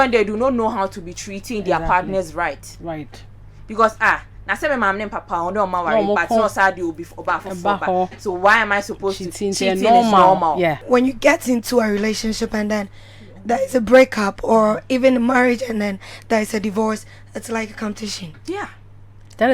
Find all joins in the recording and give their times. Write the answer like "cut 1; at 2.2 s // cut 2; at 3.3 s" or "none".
cut 1; at 10.8 s